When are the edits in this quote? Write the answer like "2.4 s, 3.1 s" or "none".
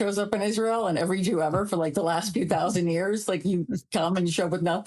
none